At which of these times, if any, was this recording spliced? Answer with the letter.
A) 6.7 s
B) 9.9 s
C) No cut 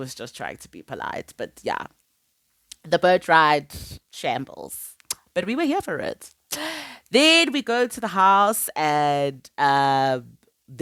C